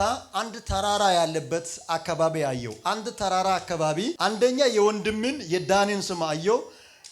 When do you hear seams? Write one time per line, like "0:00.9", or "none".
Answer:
0:04.1